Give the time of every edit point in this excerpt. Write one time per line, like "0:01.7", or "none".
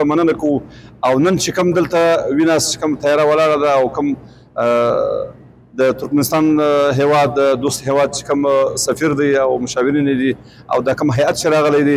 none